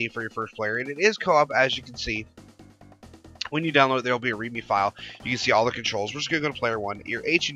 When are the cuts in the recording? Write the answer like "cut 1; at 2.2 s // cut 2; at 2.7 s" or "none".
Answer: cut 1; at 3.2 s